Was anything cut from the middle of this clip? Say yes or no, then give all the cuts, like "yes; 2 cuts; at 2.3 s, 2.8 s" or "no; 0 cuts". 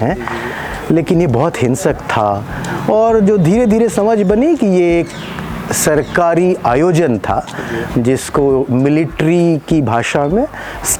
no; 0 cuts